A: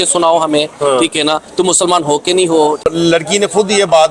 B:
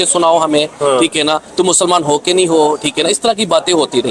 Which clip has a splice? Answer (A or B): A